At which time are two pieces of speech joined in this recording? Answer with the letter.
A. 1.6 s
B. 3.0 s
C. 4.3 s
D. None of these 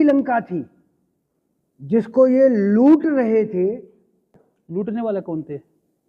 C